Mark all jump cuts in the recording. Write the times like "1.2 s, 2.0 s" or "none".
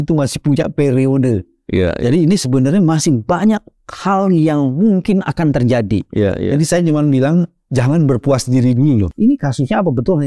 9.1 s